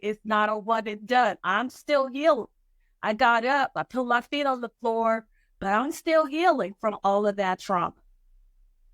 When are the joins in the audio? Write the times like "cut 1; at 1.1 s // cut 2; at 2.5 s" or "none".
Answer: none